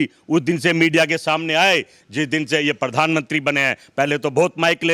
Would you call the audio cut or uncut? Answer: uncut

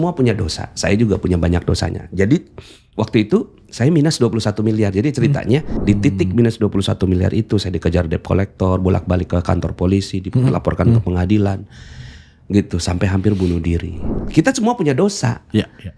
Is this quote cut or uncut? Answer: cut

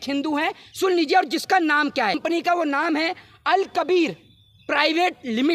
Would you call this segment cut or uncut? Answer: cut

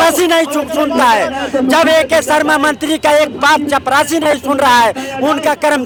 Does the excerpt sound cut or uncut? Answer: uncut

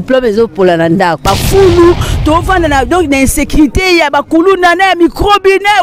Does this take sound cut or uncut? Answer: cut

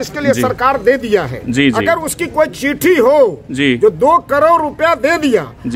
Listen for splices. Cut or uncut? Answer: uncut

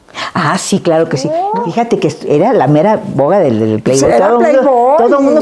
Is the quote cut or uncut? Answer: cut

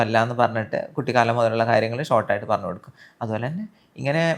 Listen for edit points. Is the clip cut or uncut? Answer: uncut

